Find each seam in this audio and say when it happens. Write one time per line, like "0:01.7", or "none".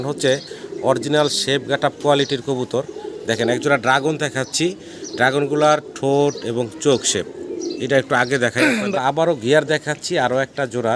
0:08.9